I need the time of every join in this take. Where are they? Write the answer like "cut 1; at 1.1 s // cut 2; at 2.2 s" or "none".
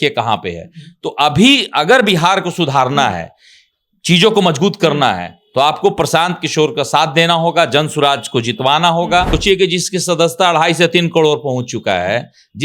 cut 1; at 9.3 s